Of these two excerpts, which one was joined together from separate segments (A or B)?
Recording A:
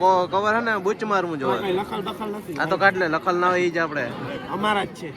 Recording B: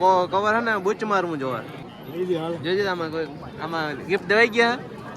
A